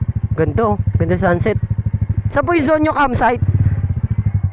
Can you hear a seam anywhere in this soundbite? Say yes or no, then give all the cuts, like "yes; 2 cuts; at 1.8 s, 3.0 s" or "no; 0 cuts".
yes; 1 cut; at 2.1 s